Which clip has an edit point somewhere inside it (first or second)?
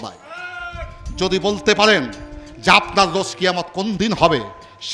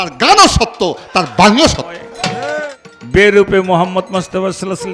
second